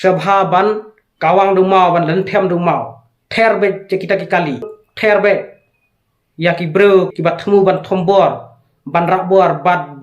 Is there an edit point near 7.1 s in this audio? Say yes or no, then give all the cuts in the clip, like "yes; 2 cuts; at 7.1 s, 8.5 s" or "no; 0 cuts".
yes; 2 cuts; at 4.8 s, 7.1 s